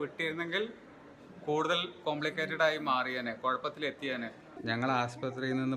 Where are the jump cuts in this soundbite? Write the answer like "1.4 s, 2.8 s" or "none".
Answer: 4.5 s